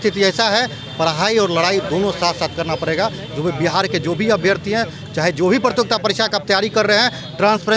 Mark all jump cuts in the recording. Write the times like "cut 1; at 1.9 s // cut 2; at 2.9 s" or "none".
none